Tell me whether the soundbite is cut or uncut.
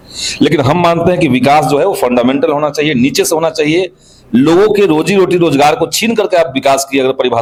uncut